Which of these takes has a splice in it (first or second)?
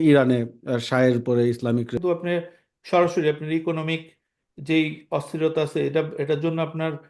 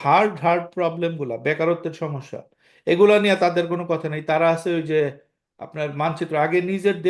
first